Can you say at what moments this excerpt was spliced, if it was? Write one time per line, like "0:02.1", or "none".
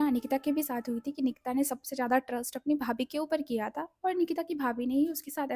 none